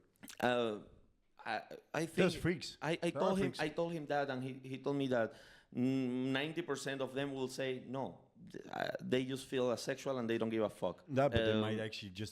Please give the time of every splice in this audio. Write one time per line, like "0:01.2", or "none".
0:11.1